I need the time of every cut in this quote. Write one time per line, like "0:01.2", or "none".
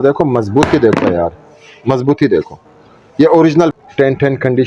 0:03.7